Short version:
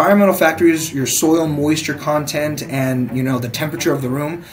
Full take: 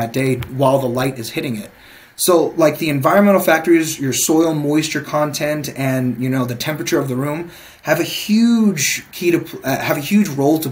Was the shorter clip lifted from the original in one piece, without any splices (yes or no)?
yes